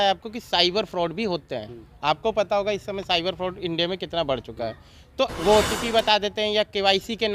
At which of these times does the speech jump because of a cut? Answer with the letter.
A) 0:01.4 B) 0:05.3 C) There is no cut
B